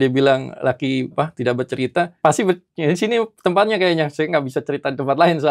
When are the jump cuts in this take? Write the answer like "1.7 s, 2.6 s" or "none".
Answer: 1.1 s, 2.1 s